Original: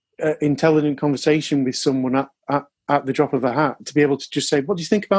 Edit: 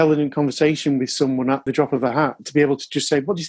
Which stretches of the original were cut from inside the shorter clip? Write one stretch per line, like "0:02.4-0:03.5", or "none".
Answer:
0:02.3-0:03.1